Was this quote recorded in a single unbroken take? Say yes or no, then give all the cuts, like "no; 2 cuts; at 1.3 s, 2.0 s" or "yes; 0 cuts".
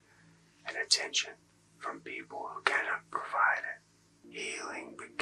no; 1 cut; at 4.2 s